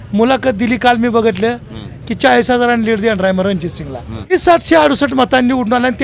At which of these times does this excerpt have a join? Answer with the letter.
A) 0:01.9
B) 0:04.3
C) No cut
B